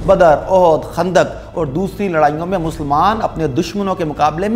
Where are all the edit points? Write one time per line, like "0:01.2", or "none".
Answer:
none